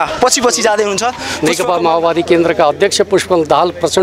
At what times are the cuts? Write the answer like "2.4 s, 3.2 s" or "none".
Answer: 1.2 s